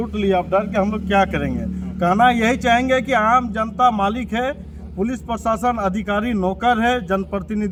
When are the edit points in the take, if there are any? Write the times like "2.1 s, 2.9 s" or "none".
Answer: none